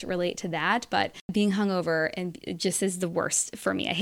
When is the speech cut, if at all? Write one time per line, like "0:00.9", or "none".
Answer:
0:01.2